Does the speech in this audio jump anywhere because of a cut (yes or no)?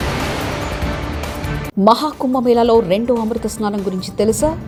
no